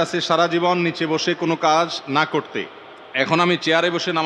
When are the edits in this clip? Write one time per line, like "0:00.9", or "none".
none